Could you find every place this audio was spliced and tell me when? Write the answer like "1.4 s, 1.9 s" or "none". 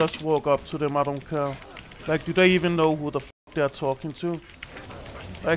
none